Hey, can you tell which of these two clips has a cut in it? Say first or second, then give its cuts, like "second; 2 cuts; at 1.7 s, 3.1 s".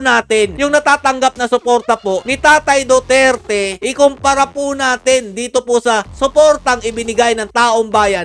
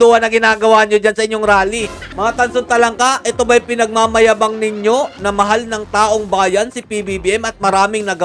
second; 1 cut; at 2.1 s